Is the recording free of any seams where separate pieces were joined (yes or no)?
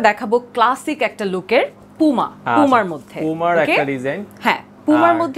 yes